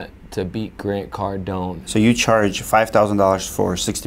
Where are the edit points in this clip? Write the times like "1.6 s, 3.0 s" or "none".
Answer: 1.8 s